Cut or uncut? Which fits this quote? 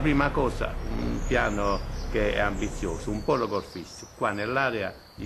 cut